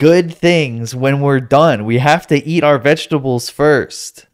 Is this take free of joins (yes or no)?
yes